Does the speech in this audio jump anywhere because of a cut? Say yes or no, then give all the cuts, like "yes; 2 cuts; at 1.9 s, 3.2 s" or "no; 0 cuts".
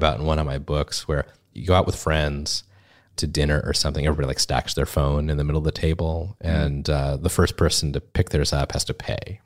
yes; 2 cuts; at 1.4 s, 3.1 s